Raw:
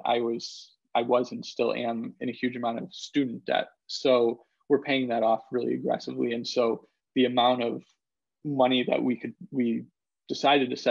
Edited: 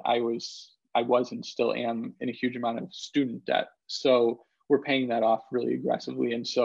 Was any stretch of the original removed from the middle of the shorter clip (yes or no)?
no